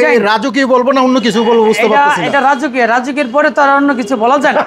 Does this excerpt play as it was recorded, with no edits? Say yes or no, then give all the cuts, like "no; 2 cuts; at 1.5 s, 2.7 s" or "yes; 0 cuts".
yes; 0 cuts